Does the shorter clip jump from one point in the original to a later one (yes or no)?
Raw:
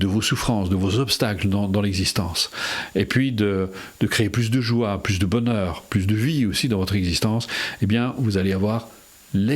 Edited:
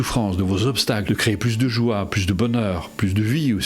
yes